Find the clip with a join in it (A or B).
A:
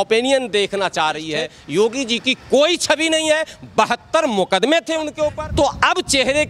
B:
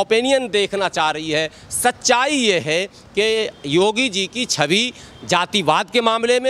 A